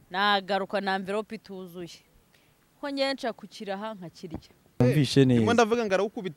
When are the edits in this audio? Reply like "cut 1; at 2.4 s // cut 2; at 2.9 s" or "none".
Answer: cut 1; at 4.8 s